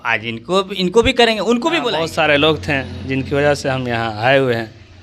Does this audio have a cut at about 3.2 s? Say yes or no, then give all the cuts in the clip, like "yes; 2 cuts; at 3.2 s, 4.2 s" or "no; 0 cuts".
no; 1 cut; at 1.9 s